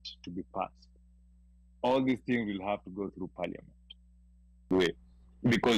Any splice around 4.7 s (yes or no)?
yes